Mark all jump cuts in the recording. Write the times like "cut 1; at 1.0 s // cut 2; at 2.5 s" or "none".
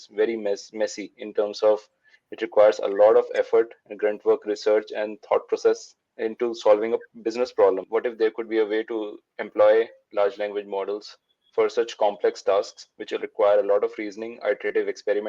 cut 1; at 7.8 s